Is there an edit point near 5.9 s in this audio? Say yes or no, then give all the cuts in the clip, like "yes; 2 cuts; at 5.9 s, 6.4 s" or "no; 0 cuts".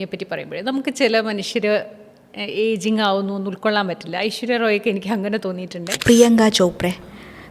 yes; 1 cut; at 5.9 s